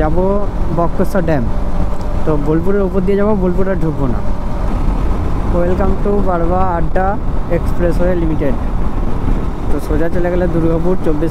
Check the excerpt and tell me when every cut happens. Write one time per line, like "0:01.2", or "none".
0:04.7

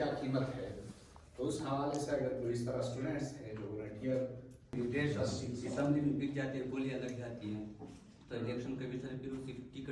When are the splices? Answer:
0:04.7

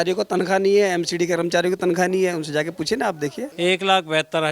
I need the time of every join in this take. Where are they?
0:03.5

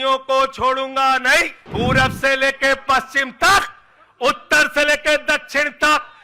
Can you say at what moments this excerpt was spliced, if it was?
0:01.6

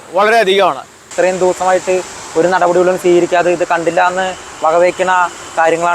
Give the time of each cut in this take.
0:01.1

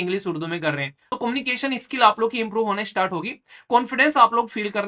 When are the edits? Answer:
0:01.0

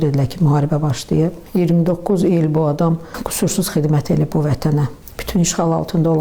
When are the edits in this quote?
0:01.4
0:03.2
0:05.0

